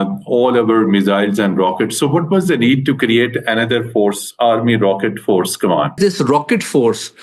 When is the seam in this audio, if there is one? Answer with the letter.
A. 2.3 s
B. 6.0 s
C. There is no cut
B